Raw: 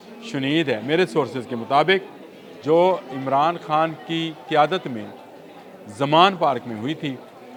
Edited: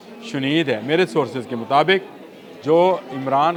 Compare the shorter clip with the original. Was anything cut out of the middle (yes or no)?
no